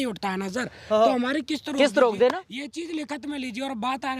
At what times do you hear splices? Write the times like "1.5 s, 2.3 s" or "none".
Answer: none